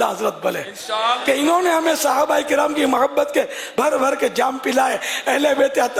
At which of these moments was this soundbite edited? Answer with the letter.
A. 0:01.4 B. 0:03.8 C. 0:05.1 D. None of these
D